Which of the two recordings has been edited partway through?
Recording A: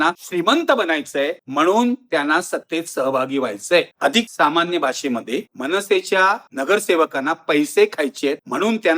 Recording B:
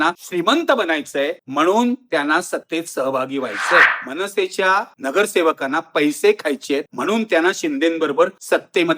B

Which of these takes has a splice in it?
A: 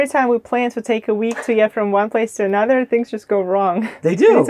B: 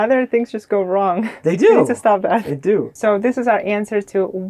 B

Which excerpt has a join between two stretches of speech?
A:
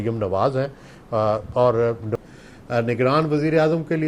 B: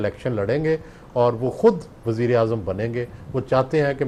A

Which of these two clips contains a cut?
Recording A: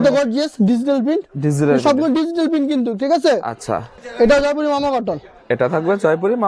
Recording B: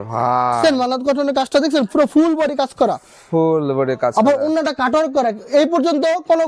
A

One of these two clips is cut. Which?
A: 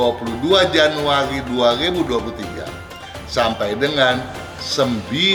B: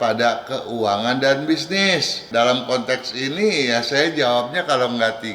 B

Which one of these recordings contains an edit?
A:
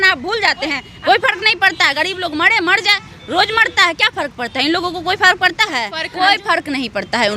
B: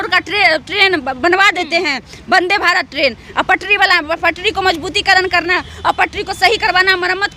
A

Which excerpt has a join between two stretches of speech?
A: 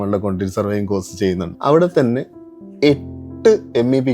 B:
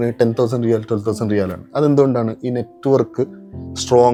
A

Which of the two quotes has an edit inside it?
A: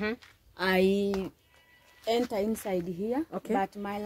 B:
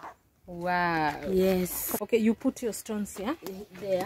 B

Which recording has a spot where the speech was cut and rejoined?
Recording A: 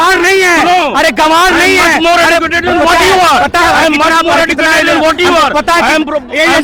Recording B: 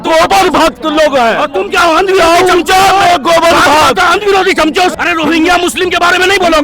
B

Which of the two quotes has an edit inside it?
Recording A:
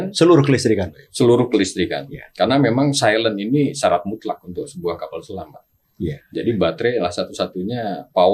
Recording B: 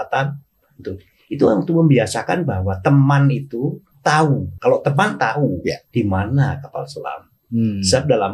B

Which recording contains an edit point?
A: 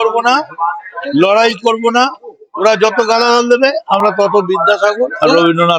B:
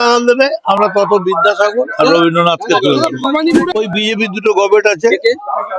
B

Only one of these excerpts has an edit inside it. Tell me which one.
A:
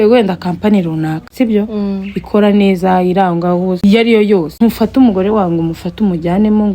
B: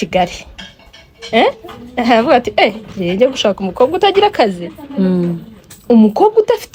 A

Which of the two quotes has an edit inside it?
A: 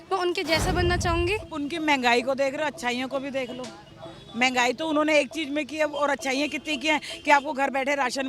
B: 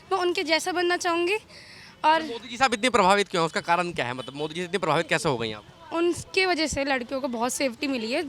A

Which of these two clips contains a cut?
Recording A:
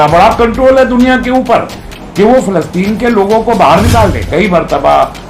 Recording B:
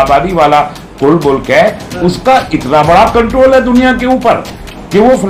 A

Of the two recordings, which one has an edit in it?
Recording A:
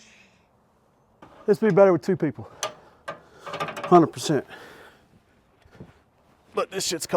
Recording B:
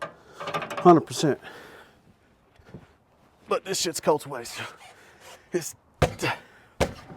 A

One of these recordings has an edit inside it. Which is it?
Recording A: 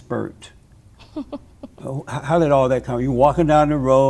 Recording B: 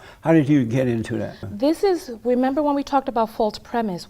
B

